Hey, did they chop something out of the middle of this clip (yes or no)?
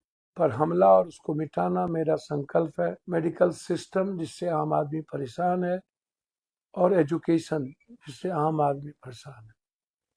yes